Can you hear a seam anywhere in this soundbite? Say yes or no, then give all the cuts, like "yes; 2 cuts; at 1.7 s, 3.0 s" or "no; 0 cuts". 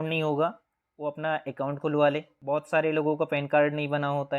yes; 1 cut; at 2.3 s